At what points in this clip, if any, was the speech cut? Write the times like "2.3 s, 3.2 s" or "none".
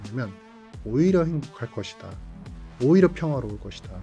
none